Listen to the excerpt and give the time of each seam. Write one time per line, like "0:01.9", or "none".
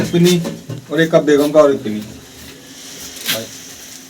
0:02.4